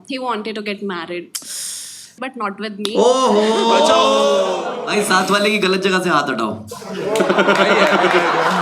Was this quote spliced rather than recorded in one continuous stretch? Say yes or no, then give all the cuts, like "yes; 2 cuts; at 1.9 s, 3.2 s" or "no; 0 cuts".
yes; 2 cuts; at 2.2 s, 4.7 s